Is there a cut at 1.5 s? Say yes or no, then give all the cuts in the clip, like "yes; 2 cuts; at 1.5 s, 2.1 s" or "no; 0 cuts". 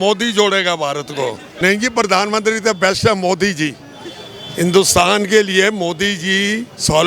yes; 1 cut; at 1.5 s